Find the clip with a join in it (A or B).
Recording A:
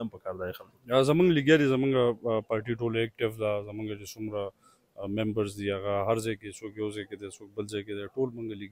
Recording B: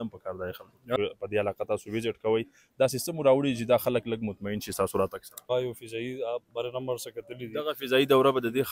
B